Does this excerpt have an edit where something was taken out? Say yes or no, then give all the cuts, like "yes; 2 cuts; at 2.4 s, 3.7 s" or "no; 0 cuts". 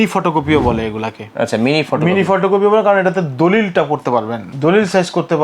yes; 1 cut; at 4.4 s